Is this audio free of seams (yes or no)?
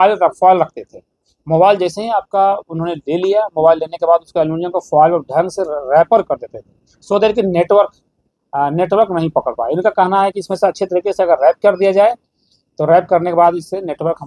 yes